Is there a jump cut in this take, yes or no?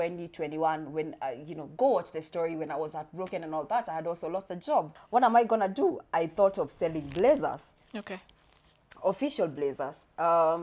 no